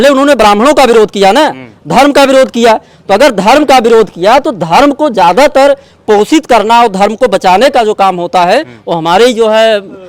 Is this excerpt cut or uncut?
uncut